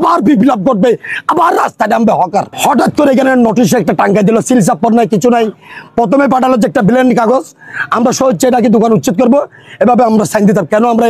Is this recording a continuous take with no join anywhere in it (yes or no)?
no